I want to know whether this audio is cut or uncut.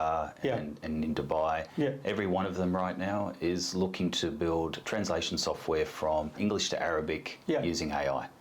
cut